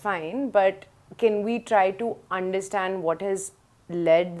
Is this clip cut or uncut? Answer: uncut